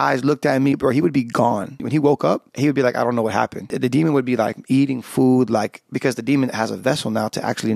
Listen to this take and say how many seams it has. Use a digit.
4